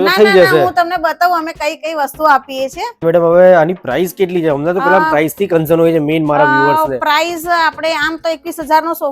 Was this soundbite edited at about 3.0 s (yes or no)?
yes